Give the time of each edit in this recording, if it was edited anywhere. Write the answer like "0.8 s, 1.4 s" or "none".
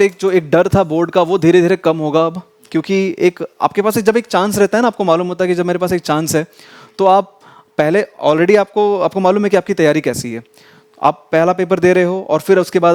none